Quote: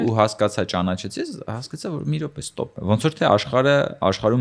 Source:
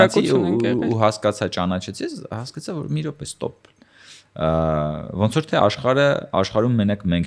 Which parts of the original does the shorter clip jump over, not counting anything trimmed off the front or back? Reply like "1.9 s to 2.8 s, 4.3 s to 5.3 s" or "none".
3.6 s to 5.1 s